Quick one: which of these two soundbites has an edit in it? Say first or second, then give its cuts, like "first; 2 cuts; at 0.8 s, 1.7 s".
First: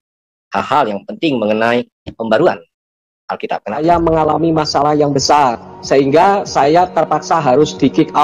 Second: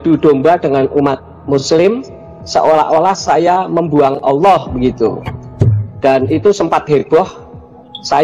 first; 1 cut; at 3.8 s